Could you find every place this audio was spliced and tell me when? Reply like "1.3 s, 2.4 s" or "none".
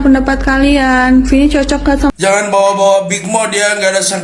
2.1 s